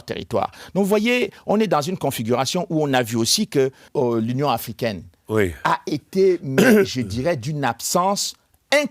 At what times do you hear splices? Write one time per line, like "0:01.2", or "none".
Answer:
0:03.9